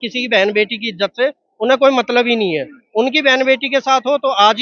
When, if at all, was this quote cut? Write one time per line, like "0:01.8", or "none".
none